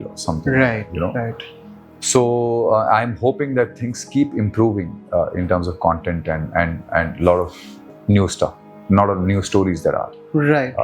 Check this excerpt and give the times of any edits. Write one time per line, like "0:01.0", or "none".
none